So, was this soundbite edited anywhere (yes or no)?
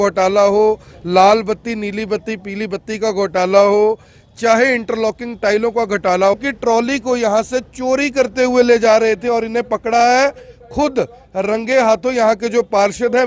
yes